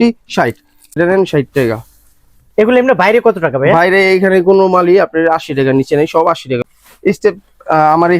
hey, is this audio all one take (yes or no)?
no